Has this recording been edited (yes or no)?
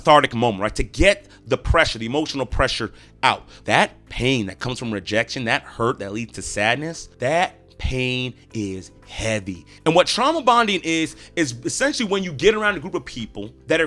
yes